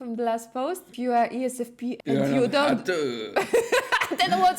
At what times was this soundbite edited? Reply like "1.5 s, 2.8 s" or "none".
0.9 s, 2.0 s